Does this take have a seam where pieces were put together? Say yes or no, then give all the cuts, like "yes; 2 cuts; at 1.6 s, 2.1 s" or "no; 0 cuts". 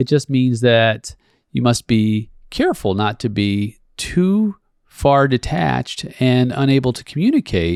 no; 0 cuts